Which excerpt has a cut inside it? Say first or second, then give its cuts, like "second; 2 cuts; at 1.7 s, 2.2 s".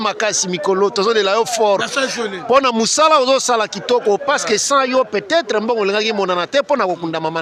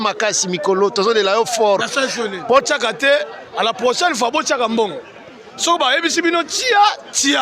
second; 1 cut; at 2.6 s